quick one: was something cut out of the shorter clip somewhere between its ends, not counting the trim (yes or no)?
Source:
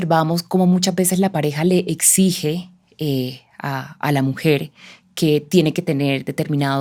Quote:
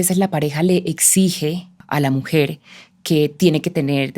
yes